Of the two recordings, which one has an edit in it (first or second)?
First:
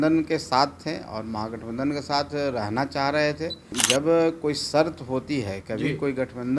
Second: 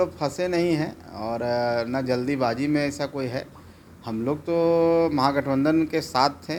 first